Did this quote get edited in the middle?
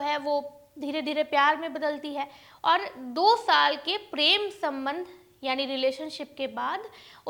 no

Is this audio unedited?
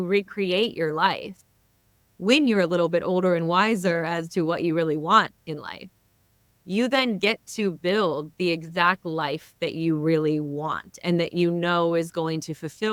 yes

